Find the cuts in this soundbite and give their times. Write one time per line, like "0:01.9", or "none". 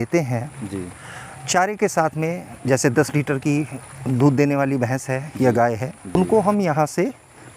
0:06.2